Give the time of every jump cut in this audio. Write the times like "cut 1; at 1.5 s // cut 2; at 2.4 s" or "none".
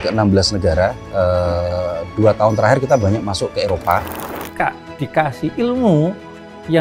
cut 1; at 4.1 s